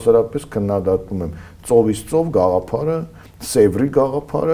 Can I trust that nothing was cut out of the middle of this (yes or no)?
yes